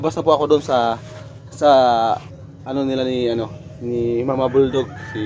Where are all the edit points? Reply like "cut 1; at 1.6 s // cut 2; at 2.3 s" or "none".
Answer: none